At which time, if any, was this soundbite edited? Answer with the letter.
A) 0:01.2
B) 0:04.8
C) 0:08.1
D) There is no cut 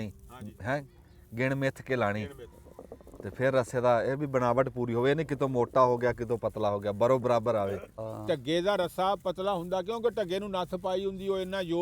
C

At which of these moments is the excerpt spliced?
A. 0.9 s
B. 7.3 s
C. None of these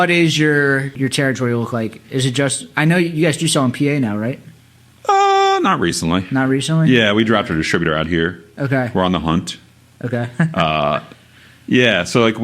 A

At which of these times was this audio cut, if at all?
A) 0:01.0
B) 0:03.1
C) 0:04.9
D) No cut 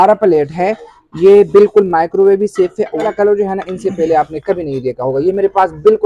B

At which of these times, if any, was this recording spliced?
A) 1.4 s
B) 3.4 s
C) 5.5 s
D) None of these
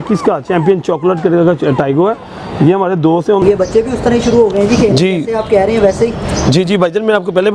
B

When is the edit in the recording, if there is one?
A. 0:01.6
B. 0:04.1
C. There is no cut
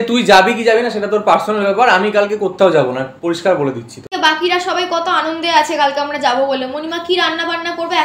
B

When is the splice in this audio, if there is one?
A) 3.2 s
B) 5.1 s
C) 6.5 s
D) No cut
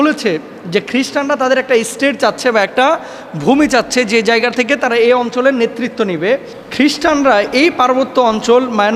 C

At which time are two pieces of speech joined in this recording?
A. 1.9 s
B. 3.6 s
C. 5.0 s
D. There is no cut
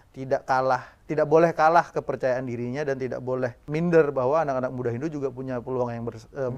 B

